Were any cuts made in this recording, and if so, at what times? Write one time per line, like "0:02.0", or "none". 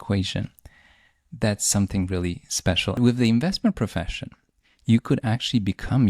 0:03.0